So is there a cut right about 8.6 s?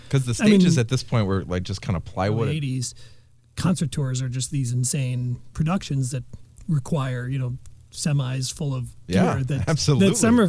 no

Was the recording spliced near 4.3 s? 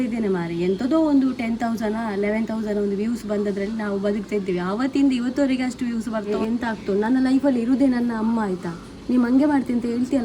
no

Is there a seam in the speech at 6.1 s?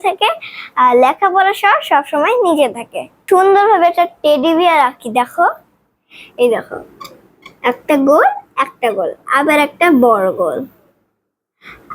no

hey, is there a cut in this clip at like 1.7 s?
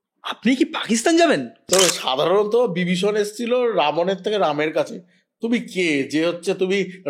yes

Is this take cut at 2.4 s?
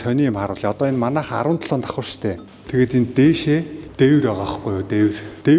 yes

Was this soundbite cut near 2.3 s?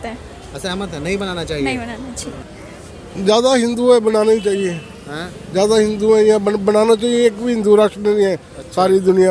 yes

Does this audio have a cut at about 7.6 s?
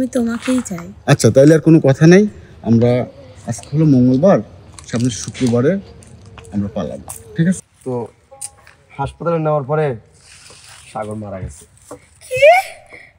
yes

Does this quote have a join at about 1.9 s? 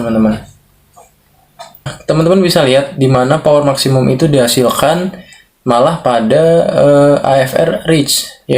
yes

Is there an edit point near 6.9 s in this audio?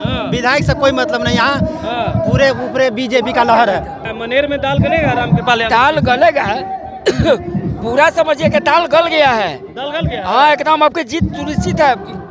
no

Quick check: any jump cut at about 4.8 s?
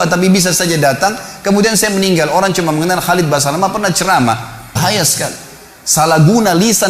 yes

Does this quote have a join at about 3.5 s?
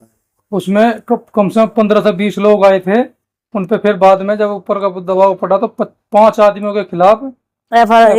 no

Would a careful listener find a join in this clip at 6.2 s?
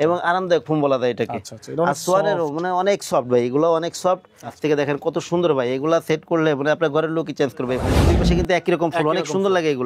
no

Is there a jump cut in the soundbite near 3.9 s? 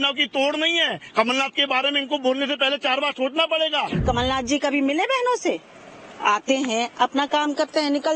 yes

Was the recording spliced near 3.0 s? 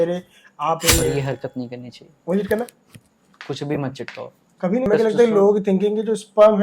no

